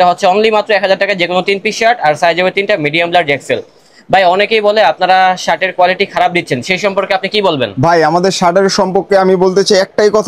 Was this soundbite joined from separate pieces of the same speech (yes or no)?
no